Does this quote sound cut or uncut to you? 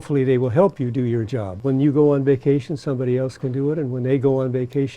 cut